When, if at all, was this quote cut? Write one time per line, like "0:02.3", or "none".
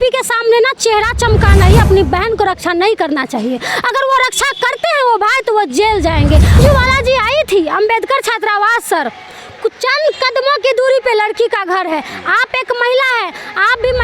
0:01.7
0:06.6